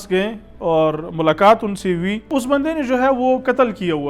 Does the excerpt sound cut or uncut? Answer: cut